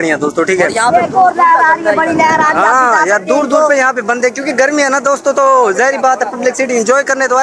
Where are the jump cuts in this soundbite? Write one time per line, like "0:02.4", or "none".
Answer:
none